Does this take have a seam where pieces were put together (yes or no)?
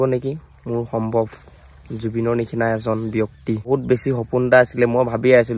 yes